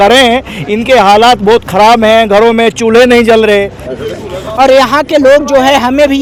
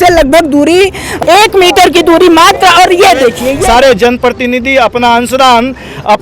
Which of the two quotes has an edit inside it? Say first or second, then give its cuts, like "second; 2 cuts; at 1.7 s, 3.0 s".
second; 2 cuts; at 1.1 s, 3.6 s